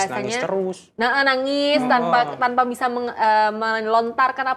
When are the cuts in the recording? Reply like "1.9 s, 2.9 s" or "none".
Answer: none